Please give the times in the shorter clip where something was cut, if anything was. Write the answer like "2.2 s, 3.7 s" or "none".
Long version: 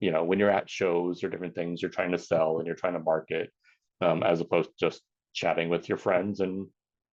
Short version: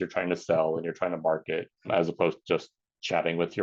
1.9 s